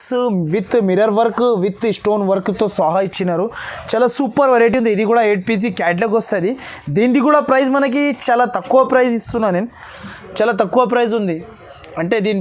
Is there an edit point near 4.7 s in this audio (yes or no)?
no